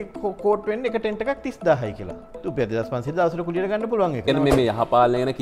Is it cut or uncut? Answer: cut